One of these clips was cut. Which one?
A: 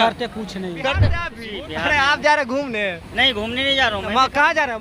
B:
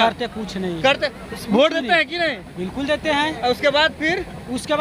A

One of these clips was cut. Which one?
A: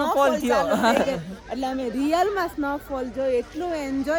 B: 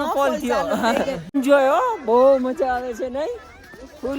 B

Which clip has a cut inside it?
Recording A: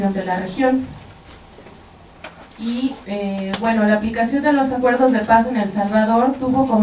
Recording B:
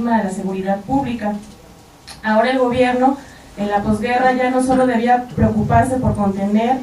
B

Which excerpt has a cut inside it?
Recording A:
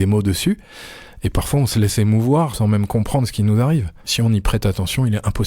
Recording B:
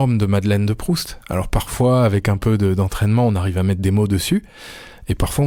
A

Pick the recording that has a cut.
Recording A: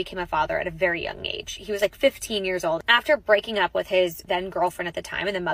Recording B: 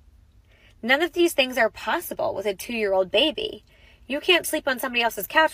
A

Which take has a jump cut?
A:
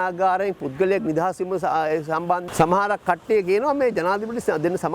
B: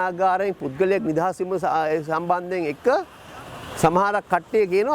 A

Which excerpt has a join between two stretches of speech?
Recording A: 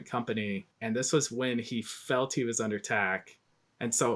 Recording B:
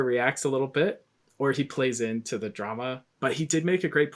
B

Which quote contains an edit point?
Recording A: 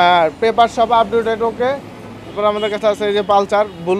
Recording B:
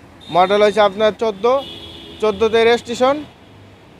A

